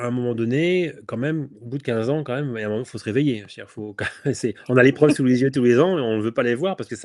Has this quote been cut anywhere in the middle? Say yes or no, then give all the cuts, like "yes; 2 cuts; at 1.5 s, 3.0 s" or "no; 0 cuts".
no; 0 cuts